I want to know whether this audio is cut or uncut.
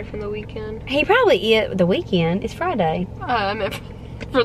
uncut